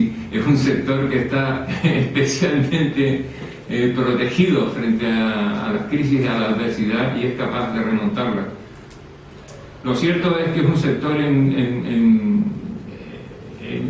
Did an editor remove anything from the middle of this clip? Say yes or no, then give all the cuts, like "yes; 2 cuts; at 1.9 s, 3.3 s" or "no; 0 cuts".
yes; 1 cut; at 2.9 s